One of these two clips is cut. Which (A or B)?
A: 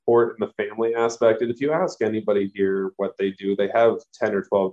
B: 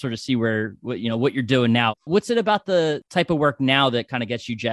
B